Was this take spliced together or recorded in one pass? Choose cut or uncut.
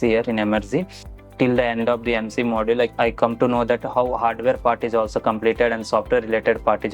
cut